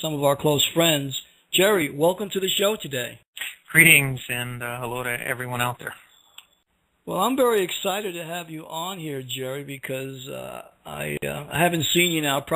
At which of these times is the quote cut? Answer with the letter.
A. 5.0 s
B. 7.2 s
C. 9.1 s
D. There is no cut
B